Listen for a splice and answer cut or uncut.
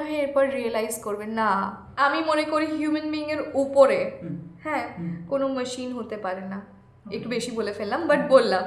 cut